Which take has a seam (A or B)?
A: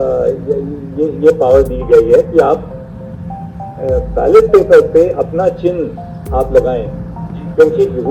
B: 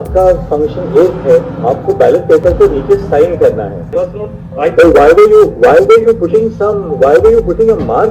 B